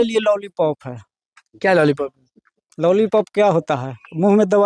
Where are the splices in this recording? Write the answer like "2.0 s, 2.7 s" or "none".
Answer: none

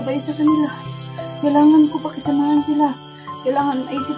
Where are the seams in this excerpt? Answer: none

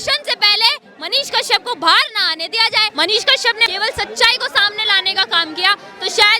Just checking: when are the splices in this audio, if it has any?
2.9 s, 3.7 s

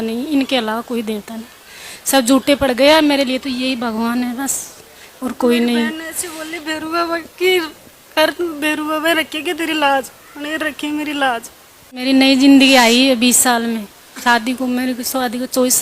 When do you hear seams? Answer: 12.0 s

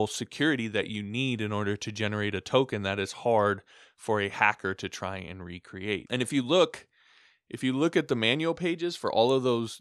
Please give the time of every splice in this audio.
6.0 s

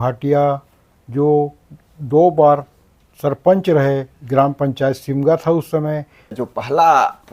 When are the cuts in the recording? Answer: 6.3 s

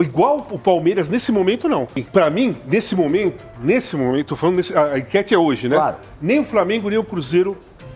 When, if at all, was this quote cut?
2.0 s

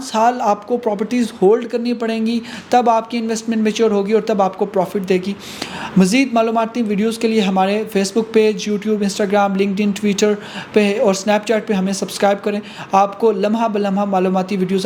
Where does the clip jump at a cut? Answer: none

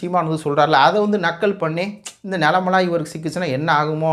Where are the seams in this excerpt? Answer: none

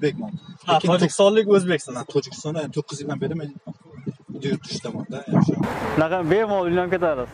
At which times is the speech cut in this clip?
5.7 s

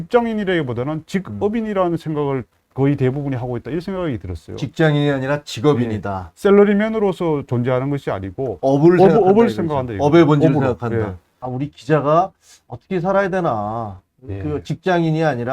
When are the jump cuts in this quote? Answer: 11.4 s

